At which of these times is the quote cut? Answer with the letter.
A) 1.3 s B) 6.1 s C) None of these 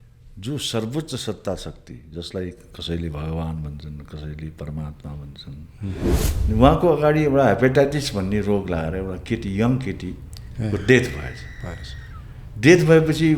B